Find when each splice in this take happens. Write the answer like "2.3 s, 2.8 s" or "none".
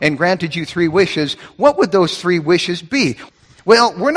3.2 s